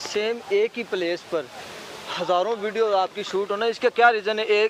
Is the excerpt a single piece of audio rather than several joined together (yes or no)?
yes